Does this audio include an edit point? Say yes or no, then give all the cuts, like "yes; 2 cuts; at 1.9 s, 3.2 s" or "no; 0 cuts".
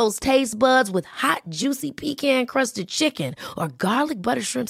no; 0 cuts